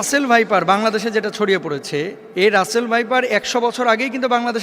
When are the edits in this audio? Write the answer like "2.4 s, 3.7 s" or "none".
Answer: 2.2 s